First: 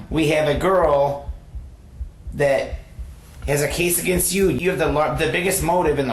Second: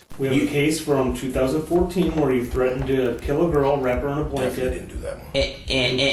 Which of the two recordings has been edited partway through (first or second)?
first